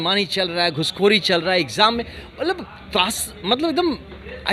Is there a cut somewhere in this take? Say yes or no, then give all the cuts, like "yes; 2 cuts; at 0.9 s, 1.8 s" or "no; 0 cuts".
no; 0 cuts